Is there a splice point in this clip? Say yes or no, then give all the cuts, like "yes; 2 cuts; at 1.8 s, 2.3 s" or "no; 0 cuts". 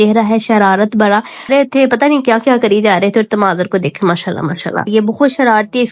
yes; 1 cut; at 1.5 s